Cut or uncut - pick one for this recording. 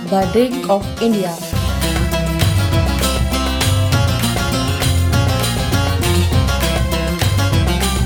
uncut